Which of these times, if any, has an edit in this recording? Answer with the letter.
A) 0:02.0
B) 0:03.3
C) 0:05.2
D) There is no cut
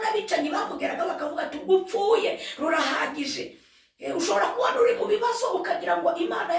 D